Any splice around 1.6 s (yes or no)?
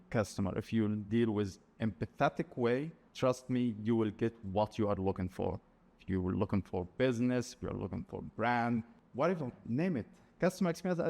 no